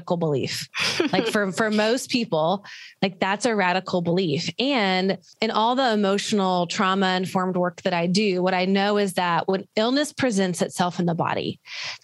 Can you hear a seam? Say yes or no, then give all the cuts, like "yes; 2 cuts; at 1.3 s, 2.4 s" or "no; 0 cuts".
yes; 1 cut; at 5.3 s